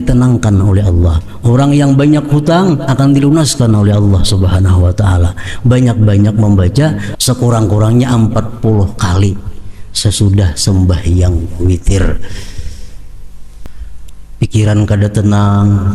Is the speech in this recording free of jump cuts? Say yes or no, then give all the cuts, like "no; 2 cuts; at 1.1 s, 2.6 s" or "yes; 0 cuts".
no; 2 cuts; at 7.1 s, 13.7 s